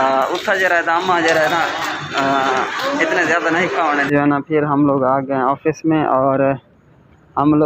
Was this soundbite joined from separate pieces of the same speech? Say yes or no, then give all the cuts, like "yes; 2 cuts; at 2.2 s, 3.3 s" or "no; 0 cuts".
yes; 1 cut; at 3.9 s